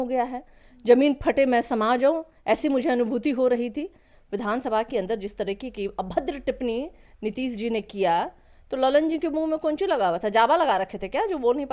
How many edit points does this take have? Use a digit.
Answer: 0